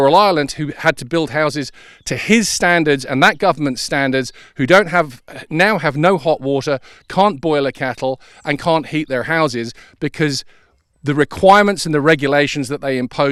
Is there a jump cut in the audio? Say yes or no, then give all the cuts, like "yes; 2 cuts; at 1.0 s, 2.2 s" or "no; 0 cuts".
no; 0 cuts